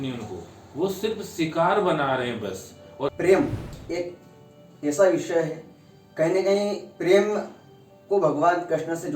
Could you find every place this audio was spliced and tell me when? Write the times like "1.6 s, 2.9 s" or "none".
3.1 s